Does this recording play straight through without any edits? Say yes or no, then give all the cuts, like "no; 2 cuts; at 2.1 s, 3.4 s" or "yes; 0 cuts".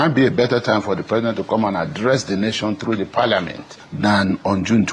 yes; 0 cuts